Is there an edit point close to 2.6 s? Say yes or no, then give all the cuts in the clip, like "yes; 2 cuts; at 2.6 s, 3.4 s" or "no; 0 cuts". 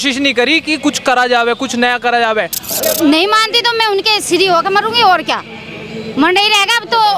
yes; 1 cut; at 2.6 s